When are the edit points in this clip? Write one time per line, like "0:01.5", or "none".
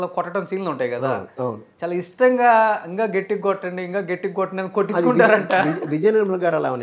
0:01.7